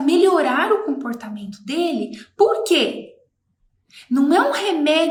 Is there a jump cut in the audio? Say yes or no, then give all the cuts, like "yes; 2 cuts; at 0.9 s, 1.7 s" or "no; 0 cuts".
no; 0 cuts